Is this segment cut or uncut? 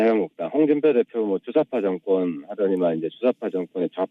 uncut